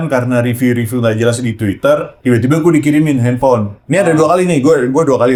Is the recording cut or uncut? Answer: uncut